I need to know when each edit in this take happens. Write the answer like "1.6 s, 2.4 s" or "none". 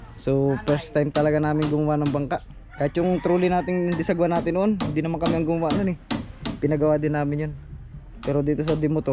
none